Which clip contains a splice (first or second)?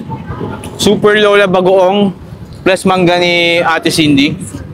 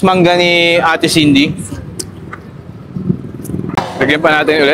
second